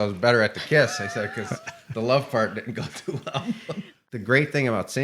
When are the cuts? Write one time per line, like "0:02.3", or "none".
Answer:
0:04.0